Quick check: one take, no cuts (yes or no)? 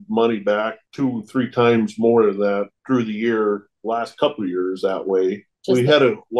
no